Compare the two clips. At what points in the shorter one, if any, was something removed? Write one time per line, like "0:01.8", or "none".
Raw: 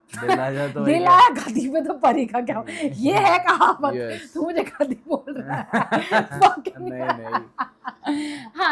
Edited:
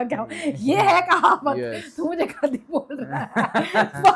none